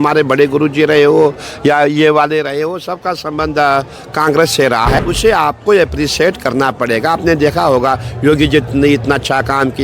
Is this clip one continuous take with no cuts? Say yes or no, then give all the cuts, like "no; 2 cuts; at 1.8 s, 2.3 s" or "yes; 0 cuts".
no; 1 cut; at 4.9 s